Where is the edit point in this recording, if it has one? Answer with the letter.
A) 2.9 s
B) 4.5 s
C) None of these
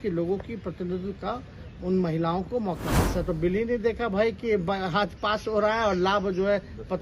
A